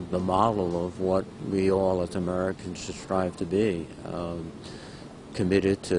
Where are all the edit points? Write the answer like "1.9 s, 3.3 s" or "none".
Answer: 1.4 s